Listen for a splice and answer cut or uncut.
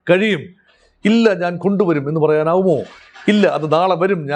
uncut